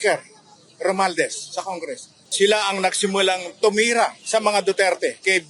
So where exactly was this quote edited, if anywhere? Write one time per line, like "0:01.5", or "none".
0:02.2